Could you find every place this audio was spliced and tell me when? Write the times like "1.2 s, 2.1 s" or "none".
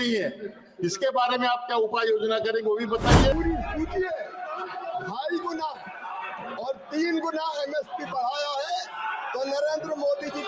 3.3 s

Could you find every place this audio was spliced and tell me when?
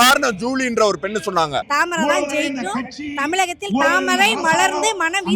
1.6 s

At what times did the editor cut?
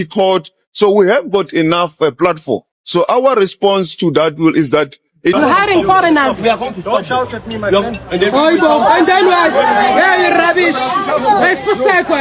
5.3 s

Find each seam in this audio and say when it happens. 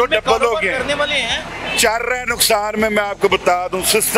none

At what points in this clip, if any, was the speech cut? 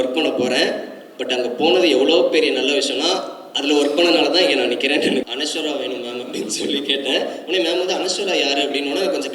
5.2 s

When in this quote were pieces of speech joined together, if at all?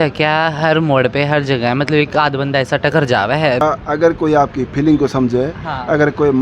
3.6 s

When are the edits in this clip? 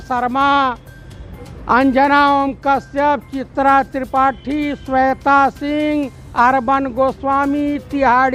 none

